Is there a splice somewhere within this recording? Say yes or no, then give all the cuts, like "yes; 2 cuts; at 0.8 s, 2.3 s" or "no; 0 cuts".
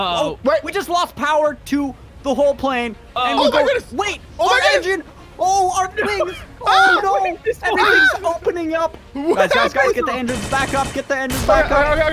no; 0 cuts